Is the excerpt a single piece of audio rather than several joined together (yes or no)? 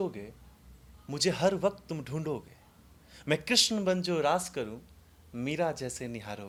yes